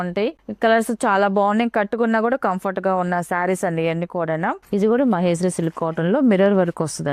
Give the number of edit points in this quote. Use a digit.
1